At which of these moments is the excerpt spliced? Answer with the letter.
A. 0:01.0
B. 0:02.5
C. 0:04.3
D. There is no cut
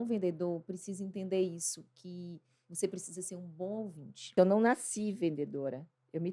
C